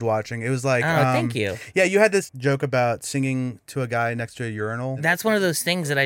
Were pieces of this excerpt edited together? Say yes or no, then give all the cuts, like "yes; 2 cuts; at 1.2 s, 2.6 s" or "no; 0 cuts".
yes; 2 cuts; at 2.3 s, 5.0 s